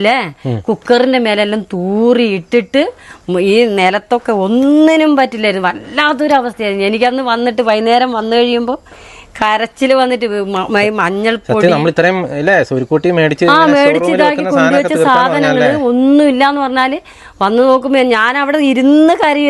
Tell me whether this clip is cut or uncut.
uncut